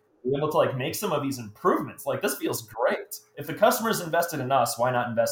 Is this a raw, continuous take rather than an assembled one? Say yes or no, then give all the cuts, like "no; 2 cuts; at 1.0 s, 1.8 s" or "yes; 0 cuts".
no; 1 cut; at 3.3 s